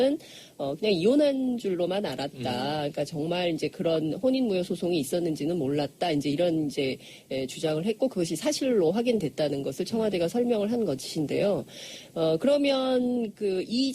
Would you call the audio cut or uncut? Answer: cut